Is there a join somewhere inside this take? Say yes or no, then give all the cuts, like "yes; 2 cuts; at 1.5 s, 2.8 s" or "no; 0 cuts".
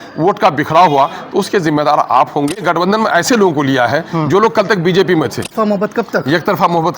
yes; 2 cuts; at 2.6 s, 5.5 s